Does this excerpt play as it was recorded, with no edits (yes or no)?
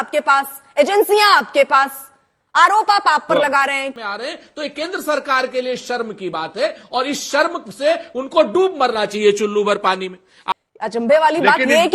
no